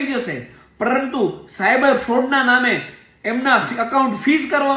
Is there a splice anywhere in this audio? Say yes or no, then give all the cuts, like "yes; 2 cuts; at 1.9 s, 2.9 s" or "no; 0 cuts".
no; 0 cuts